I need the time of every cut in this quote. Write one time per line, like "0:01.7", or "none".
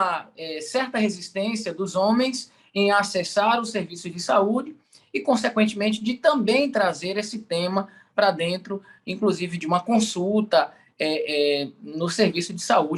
none